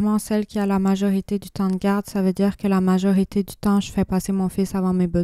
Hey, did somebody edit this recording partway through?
no; 0 cuts

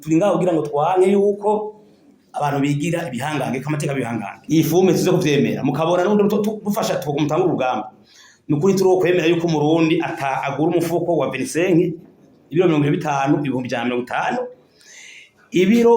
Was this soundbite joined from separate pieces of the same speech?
yes; 1 cut; at 4.4 s

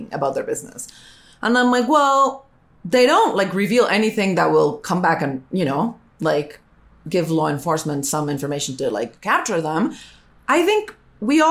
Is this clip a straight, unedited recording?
yes; 0 cuts

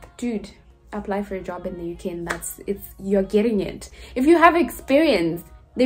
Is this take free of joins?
yes; 0 cuts

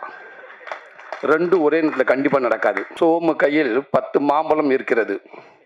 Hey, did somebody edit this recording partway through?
yes; 1 cut; at 2.9 s

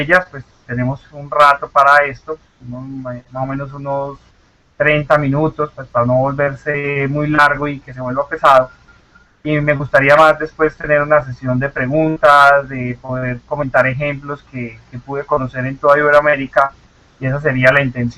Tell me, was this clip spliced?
yes; 1 cut; at 15.4 s

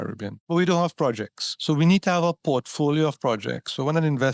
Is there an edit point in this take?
no; 0 cuts

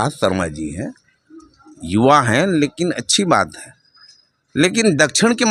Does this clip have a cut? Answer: no; 0 cuts

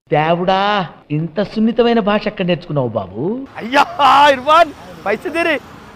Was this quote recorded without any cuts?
no; 1 cut; at 3.5 s

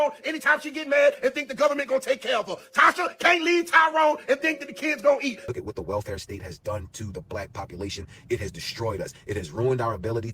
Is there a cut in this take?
yes; 1 cut; at 5.4 s

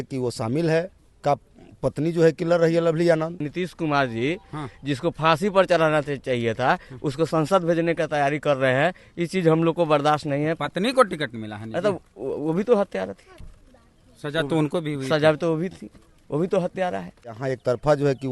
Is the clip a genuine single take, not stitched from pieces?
no; 3 cuts; at 1.0 s, 3.5 s, 17.4 s

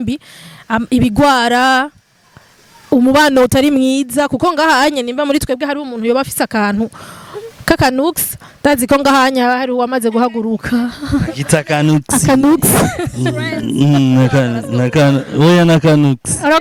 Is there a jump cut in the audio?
no; 0 cuts

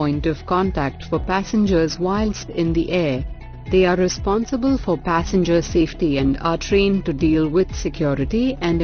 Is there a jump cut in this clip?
no; 0 cuts

